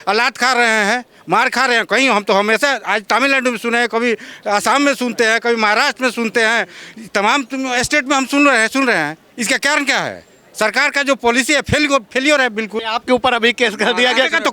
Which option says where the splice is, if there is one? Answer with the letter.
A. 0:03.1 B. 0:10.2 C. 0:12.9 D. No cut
C